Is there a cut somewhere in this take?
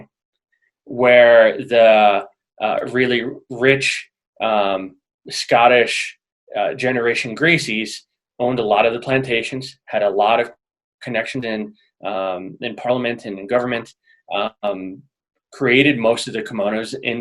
no; 0 cuts

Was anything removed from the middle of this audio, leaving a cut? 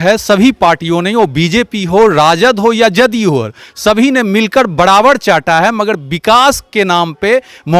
no; 0 cuts

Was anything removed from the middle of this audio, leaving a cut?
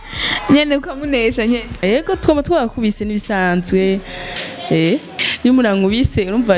yes; 2 cuts; at 1.8 s, 5.2 s

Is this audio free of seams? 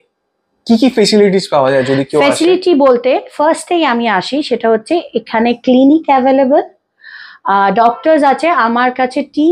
yes; 0 cuts

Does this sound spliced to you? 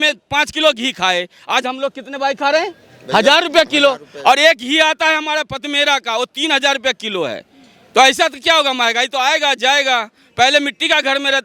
no; 0 cuts

